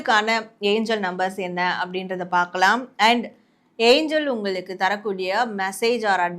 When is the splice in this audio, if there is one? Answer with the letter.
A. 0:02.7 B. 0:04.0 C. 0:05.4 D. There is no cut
D